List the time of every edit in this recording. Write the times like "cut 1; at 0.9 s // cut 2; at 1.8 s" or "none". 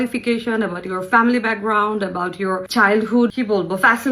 cut 1; at 2.7 s // cut 2; at 3.3 s